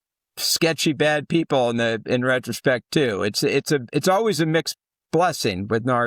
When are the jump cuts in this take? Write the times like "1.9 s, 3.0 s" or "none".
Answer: none